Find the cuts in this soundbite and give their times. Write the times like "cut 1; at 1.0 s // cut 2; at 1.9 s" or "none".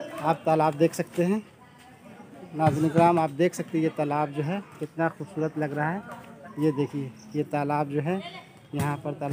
none